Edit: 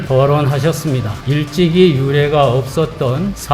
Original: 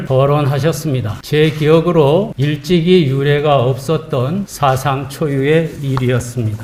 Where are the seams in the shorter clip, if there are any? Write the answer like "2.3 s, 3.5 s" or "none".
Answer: 1.2 s